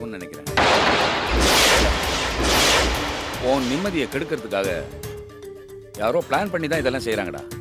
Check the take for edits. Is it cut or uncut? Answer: uncut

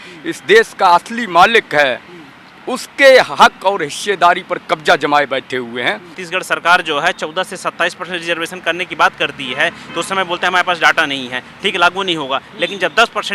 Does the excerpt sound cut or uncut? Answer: cut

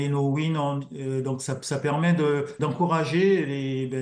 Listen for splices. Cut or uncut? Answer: cut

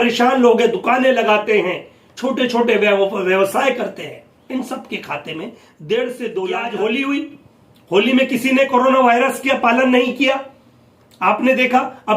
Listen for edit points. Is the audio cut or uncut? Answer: cut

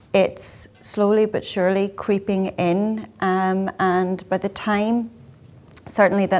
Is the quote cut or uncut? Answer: uncut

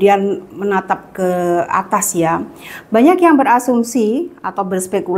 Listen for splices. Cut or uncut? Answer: uncut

